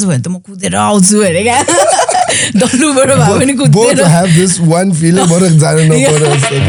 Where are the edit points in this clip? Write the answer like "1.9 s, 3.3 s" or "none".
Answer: none